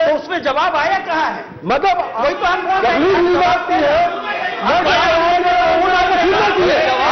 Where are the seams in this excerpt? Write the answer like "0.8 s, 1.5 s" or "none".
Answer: none